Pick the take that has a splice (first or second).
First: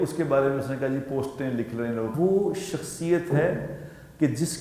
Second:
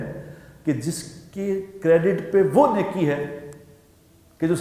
first